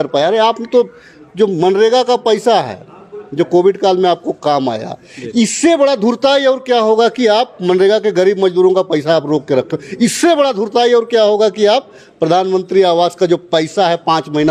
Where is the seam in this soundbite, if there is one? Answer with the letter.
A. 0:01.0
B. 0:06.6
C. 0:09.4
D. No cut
D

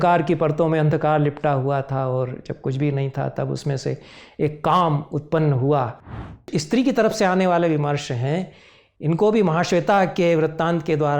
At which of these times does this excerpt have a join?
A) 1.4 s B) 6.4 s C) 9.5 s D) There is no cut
B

